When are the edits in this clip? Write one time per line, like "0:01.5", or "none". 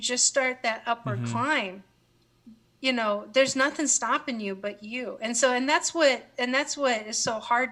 none